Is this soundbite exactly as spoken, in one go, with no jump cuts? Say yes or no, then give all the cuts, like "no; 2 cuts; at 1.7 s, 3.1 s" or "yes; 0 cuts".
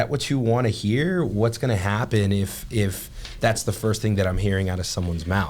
yes; 0 cuts